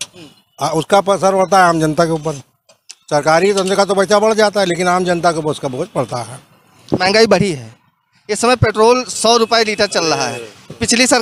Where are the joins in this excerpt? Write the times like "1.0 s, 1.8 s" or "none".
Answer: none